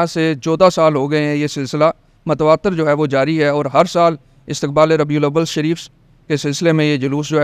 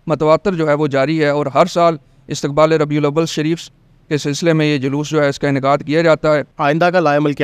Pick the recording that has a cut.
second; 1 cut; at 6.5 s

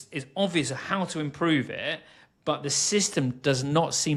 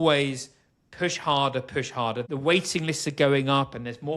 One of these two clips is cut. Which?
second; 1 cut; at 2.2 s

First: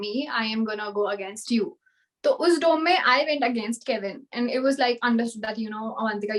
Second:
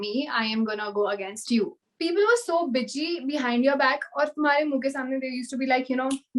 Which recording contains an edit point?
second; 1 cut; at 1.8 s

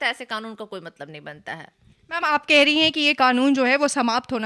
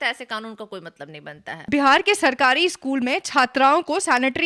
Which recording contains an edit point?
second; 1 cut; at 1.6 s

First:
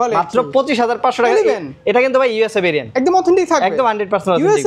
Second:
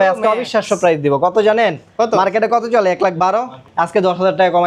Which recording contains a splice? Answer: second; 1 cut; at 3.6 s

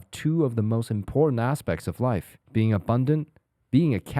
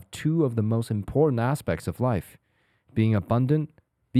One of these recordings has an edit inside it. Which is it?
first; 1 cut; at 2.4 s

